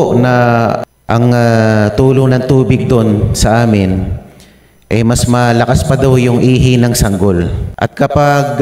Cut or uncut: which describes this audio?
cut